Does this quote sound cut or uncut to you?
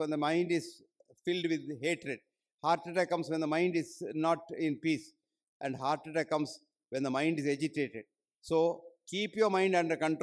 uncut